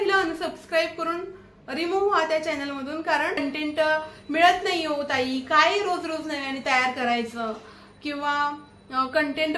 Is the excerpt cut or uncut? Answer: cut